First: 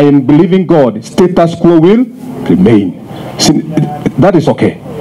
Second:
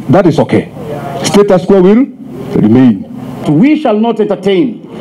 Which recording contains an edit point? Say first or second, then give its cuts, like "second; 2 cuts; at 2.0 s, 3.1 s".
second; 1 cut; at 3.4 s